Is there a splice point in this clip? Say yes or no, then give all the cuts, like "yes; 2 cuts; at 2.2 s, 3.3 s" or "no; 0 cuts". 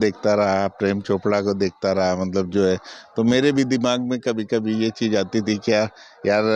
no; 0 cuts